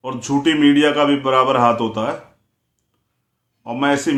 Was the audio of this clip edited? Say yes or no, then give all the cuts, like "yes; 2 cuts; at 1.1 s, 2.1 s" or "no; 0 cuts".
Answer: no; 0 cuts